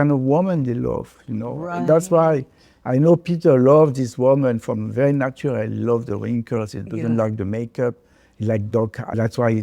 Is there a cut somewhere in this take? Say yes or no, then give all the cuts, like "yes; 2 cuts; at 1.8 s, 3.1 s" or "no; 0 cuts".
no; 0 cuts